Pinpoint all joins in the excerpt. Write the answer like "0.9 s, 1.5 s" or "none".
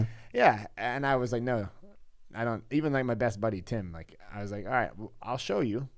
none